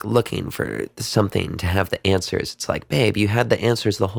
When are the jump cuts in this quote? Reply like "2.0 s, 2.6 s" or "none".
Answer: none